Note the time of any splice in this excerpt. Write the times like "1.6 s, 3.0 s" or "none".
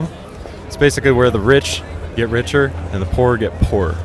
none